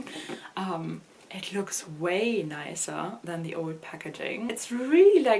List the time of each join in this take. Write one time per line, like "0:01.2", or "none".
0:04.5